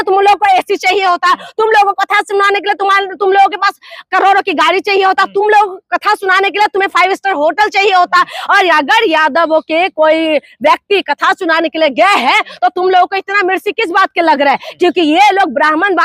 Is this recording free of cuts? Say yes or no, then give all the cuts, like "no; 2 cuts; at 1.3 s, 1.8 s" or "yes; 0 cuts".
yes; 0 cuts